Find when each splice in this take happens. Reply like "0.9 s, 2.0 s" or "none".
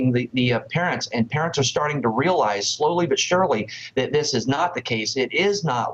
5.0 s

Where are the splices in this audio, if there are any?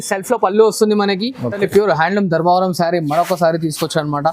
1.6 s

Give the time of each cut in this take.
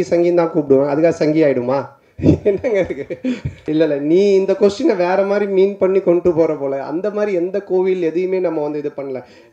3.5 s

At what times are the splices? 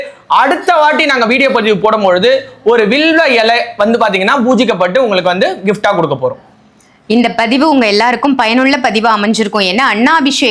none

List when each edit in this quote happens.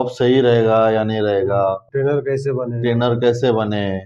1.8 s

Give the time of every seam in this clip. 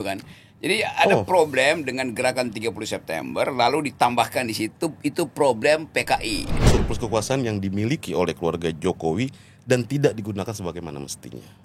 6.6 s

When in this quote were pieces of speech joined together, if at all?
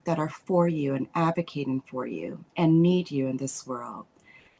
none

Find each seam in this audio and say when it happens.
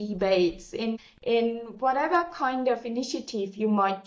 none

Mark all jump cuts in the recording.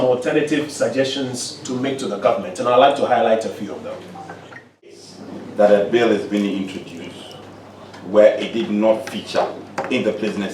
5.0 s

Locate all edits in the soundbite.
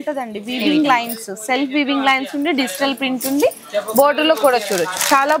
none

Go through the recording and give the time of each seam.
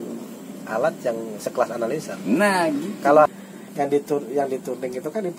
3.3 s

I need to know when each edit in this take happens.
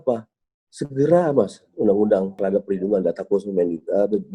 2.3 s

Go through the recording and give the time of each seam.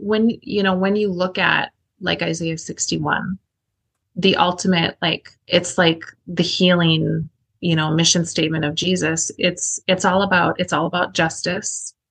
none

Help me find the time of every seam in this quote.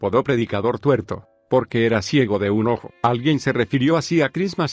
2.4 s

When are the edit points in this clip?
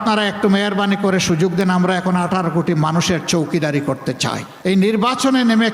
4.5 s

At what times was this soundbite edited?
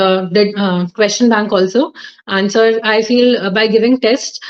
none

